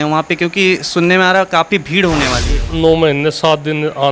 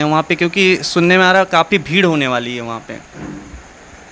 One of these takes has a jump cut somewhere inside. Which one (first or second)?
first